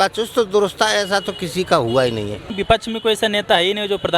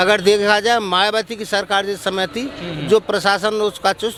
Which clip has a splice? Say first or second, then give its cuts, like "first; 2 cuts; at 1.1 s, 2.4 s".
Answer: first; 1 cut; at 2.5 s